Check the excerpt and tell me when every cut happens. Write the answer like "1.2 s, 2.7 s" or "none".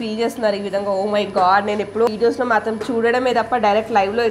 2.1 s